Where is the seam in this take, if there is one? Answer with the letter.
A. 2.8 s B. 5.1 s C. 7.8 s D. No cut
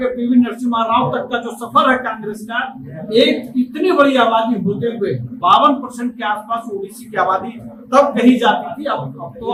D